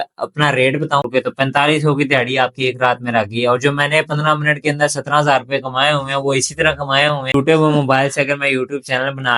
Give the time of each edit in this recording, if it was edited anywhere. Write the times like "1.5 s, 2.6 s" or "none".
1.1 s, 7.3 s